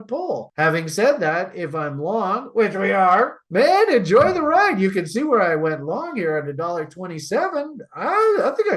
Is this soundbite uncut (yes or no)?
no